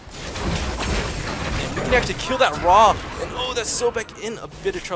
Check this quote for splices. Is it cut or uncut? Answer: uncut